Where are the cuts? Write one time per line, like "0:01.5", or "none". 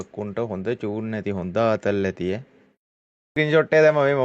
0:03.3